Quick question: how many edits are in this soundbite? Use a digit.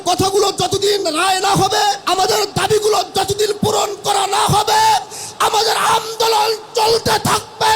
1